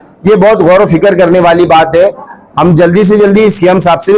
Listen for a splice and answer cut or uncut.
cut